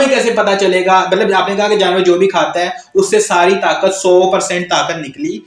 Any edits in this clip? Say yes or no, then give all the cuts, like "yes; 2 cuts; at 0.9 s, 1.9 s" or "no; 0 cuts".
no; 0 cuts